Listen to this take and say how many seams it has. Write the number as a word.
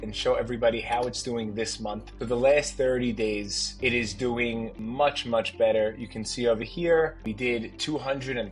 two